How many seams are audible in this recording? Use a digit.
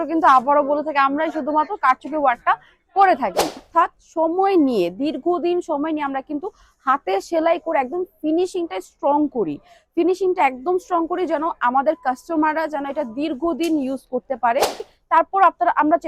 2